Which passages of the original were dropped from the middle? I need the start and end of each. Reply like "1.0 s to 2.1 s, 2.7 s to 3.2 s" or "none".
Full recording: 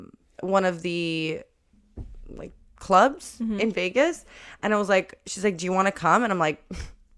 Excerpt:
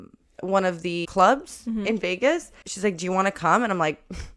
1.1 s to 2.8 s, 4.4 s to 5.2 s